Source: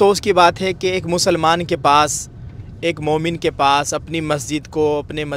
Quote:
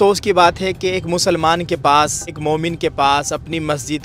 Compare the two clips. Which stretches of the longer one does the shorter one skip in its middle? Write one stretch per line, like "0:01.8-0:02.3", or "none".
0:02.4-0:03.0